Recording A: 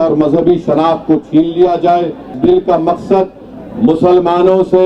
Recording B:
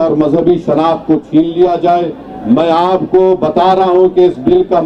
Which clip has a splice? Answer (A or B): A